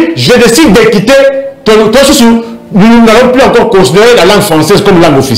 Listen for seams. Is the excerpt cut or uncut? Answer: uncut